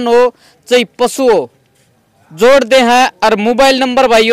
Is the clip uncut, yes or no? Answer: yes